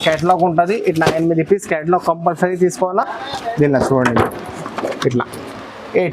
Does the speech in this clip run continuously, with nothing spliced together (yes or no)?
yes